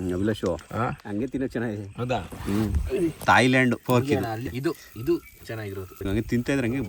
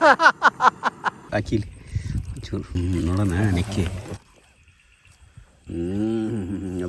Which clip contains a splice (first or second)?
first